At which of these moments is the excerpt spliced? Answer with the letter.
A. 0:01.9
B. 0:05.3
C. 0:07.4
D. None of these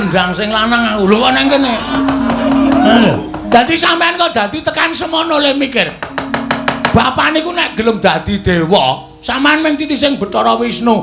A